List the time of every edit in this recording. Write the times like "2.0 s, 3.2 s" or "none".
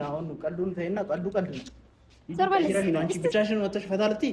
2.8 s